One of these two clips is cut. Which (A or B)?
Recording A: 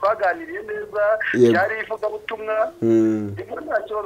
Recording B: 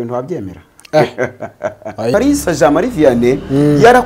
B